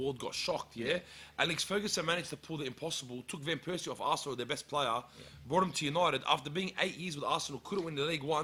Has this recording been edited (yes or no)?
no